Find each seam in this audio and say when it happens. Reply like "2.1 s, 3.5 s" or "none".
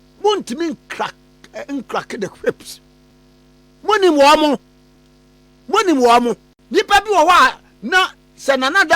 6.5 s